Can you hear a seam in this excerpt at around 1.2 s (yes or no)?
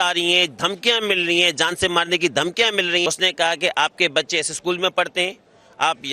no